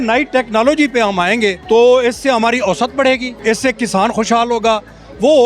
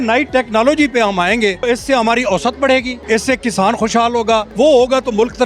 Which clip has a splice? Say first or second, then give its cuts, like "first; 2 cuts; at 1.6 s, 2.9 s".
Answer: second; 2 cuts; at 1.7 s, 4.5 s